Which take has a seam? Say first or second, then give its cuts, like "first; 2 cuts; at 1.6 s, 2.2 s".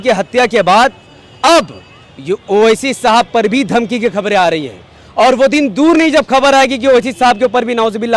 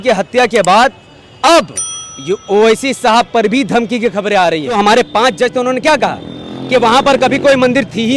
second; 1 cut; at 4.7 s